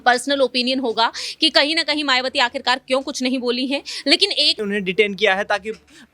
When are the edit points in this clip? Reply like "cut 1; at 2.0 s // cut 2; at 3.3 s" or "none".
cut 1; at 4.5 s